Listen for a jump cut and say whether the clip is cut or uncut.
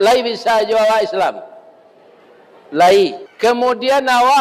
cut